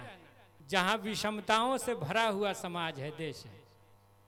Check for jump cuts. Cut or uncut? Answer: uncut